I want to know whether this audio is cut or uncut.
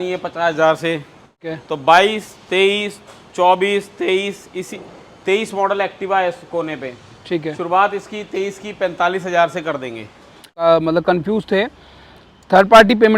cut